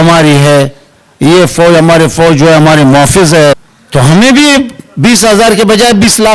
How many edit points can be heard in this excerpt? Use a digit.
1